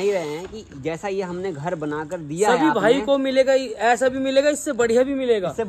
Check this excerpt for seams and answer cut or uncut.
uncut